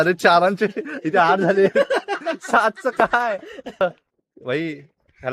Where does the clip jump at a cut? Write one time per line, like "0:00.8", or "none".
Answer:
0:03.8